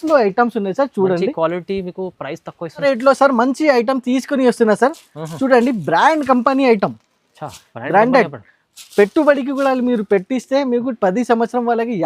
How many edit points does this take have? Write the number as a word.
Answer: one